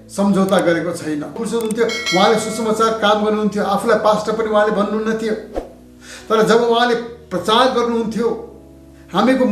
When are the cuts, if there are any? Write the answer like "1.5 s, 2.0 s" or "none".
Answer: 1.4 s